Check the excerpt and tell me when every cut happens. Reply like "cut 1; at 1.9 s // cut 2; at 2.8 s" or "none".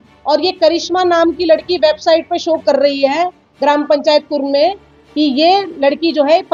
none